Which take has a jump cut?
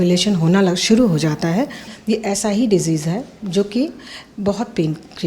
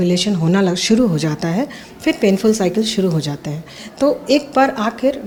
first; 1 cut; at 1.8 s

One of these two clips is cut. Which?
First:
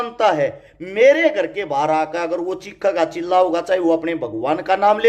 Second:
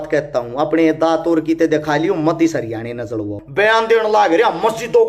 second; 1 cut; at 3.4 s

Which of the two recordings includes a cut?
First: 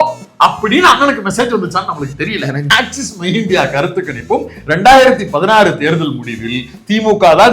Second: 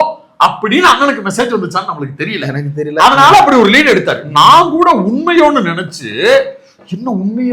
first; 1 cut; at 2.6 s

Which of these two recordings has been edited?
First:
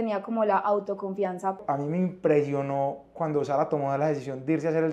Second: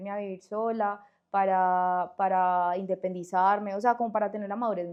first; 1 cut; at 1.6 s

